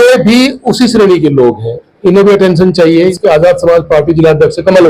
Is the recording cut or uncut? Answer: cut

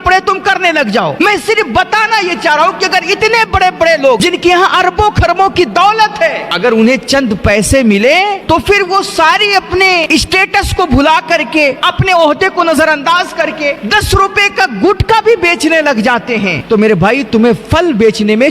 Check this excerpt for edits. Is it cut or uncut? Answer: cut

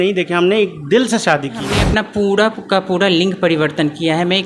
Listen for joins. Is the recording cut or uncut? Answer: cut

